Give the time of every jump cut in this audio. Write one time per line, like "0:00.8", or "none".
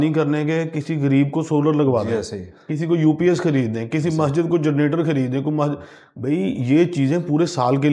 none